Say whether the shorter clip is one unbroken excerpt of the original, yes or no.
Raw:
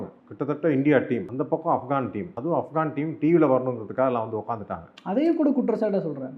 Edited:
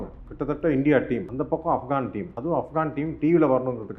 yes